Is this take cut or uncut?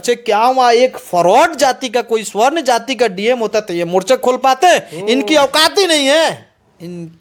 uncut